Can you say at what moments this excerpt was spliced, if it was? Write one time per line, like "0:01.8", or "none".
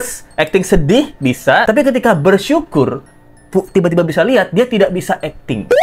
0:01.6